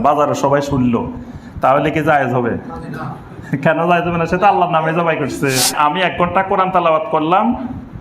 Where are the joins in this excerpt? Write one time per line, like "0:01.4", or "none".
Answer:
0:05.8